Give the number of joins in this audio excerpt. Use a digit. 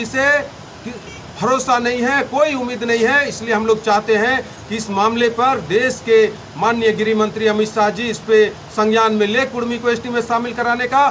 0